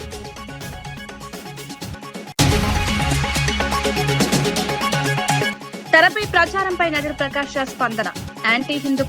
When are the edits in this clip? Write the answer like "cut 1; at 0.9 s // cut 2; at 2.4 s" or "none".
cut 1; at 1.4 s // cut 2; at 2.3 s // cut 3; at 3.7 s // cut 4; at 5.1 s